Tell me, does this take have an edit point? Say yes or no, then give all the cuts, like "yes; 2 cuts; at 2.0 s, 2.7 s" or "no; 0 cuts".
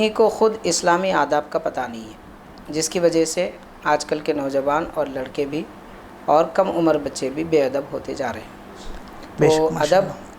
no; 0 cuts